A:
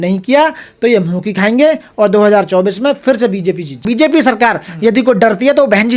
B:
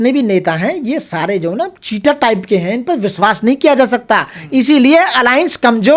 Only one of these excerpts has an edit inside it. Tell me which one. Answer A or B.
A